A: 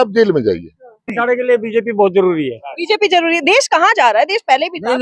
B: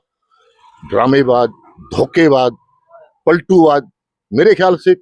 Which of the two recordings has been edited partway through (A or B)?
A